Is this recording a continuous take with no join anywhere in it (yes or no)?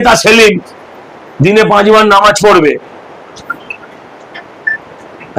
yes